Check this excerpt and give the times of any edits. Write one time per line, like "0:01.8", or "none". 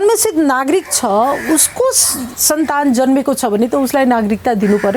none